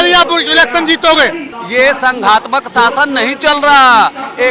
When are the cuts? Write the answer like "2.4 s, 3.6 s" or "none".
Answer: 1.5 s